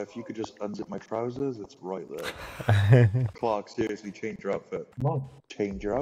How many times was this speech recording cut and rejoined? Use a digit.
0